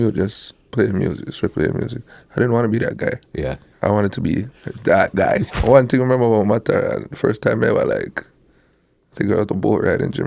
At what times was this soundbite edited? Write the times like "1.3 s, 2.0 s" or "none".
3.7 s, 5.5 s